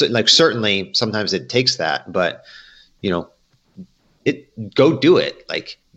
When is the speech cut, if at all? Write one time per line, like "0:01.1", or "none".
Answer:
none